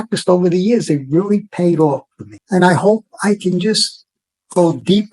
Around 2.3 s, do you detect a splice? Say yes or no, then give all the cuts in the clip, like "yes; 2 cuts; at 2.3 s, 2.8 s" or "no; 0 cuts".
yes; 1 cut; at 2.3 s